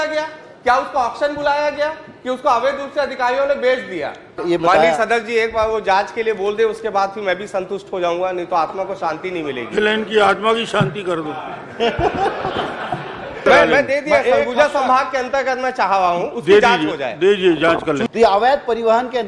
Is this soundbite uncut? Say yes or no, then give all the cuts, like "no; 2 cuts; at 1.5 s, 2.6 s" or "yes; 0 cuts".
no; 3 cuts; at 4.4 s, 13.4 s, 18.1 s